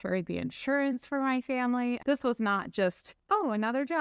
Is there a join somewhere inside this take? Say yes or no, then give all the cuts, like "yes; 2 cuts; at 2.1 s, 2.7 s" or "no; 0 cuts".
yes; 1 cut; at 2.0 s